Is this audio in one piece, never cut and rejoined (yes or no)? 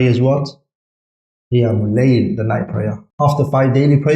no